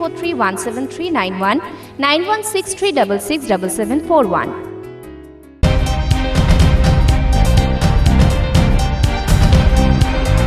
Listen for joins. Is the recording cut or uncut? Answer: cut